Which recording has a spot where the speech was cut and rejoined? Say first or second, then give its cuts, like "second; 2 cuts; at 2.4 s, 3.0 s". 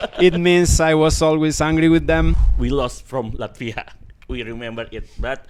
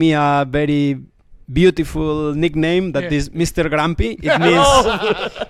first; 1 cut; at 2.4 s